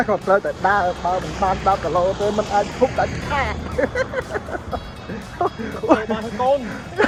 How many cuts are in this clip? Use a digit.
0